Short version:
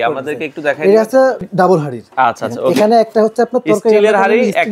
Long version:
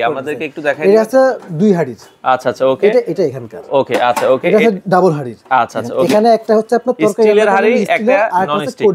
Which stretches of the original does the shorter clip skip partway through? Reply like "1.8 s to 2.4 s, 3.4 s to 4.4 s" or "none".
1.5 s to 4.8 s